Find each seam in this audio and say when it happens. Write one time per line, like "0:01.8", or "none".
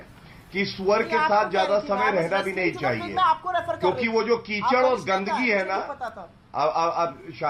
none